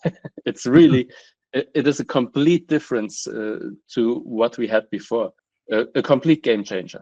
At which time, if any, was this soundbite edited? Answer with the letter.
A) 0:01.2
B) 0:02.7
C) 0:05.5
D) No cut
C